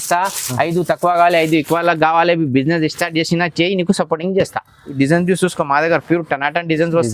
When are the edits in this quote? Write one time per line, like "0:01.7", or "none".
0:04.9